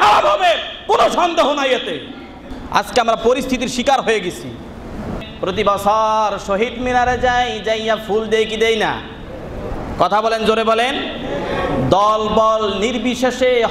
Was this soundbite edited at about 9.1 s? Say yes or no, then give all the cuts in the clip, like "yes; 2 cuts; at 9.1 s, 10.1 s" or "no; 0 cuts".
no; 1 cut; at 5.2 s